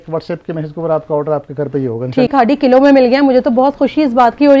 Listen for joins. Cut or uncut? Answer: cut